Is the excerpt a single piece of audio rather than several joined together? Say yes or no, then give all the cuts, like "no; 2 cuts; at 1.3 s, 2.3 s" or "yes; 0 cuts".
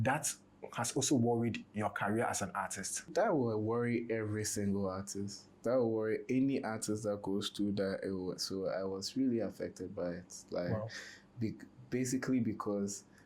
no; 1 cut; at 3.1 s